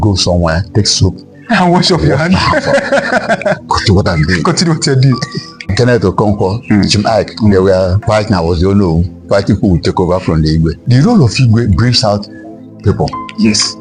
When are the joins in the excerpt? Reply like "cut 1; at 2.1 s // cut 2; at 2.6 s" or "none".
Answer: cut 1; at 5.7 s // cut 2; at 8.0 s // cut 3; at 10.8 s

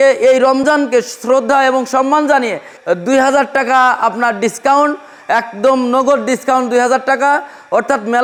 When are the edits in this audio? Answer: none

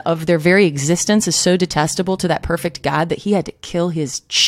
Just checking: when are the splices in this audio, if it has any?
none

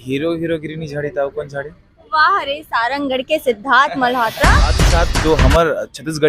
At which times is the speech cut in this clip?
cut 1; at 4.8 s

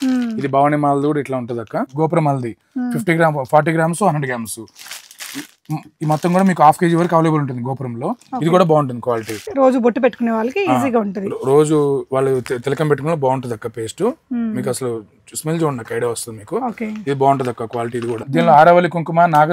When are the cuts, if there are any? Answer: cut 1; at 1.9 s // cut 2; at 9.5 s // cut 3; at 18.3 s

